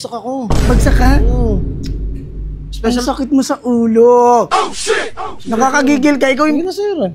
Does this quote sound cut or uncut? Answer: uncut